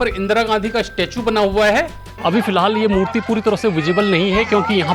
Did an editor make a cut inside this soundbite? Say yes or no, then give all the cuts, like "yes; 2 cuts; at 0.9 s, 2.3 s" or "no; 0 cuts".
yes; 1 cut; at 2.0 s